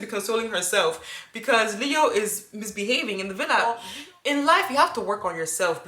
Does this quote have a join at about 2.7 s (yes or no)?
no